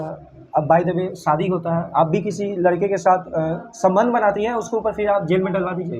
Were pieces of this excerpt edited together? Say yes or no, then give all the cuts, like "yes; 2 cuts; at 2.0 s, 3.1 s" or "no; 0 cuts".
no; 0 cuts